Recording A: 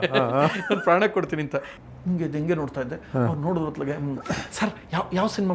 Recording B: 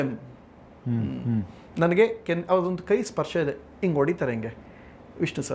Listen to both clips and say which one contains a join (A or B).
A